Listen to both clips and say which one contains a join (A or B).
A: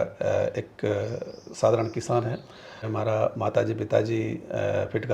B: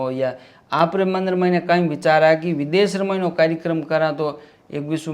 A